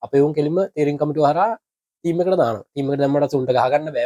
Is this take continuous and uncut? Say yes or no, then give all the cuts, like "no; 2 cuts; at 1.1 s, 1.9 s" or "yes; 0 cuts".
yes; 0 cuts